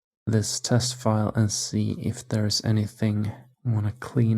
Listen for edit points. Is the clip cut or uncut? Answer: cut